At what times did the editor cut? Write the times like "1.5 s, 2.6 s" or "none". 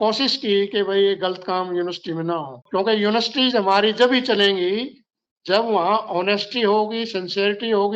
2.6 s